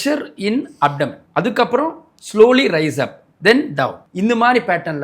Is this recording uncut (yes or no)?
no